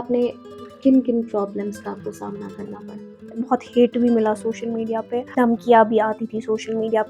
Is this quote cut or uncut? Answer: cut